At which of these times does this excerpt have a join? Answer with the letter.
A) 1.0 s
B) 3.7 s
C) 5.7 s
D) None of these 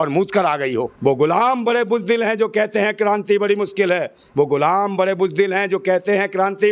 A